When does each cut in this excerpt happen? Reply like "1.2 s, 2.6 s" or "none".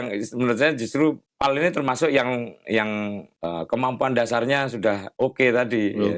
1.2 s, 3.3 s, 5.1 s